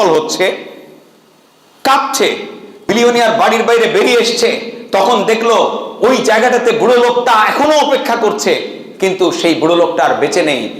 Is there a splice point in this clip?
yes; 1 cut; at 2.8 s

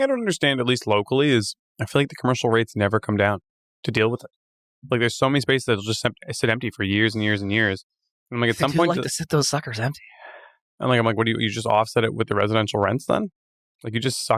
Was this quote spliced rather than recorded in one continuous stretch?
no; 0 cuts

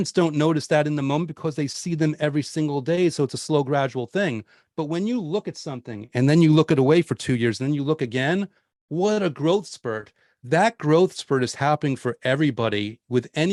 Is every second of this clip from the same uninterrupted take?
yes; 0 cuts

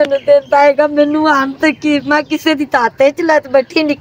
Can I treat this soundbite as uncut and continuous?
yes; 0 cuts

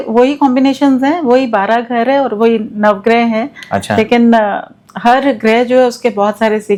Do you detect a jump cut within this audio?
no; 0 cuts

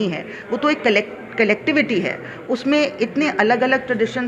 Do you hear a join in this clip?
no; 0 cuts

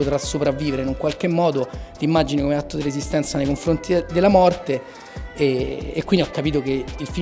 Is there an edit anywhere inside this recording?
no; 0 cuts

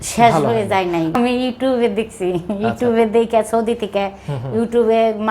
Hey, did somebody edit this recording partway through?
yes; 1 cut; at 1.2 s

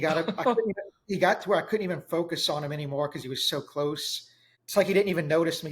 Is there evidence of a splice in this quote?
yes; 1 cut; at 4.5 s

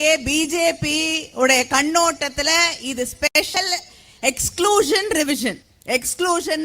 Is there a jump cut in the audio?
yes; 1 cut; at 5.7 s

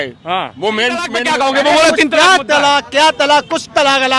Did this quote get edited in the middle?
yes; 1 cut; at 1.1 s

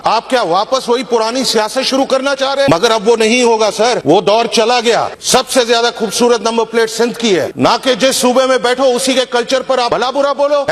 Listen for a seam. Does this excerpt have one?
no; 0 cuts

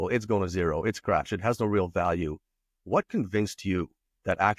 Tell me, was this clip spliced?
no; 0 cuts

